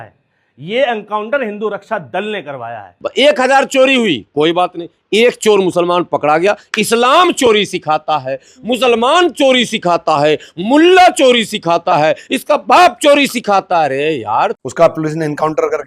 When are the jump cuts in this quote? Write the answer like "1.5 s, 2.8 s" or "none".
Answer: 2.9 s, 14.6 s